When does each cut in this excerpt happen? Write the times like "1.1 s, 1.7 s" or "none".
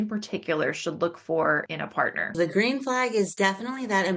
2.3 s, 3.3 s